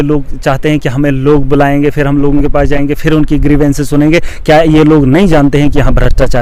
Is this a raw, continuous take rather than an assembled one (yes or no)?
yes